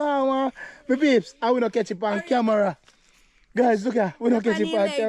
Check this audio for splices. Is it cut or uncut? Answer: uncut